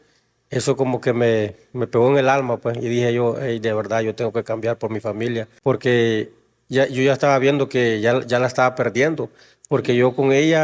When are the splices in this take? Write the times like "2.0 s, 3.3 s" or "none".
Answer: 5.5 s